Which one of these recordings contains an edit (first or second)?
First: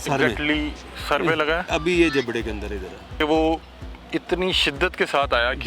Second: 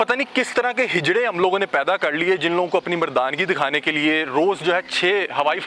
first